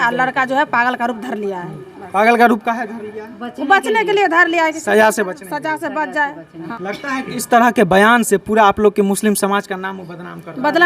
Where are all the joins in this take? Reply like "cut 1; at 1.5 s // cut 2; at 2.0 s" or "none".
cut 1; at 6.6 s